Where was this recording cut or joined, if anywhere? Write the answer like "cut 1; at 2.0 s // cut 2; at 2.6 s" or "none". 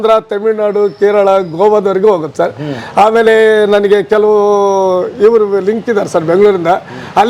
none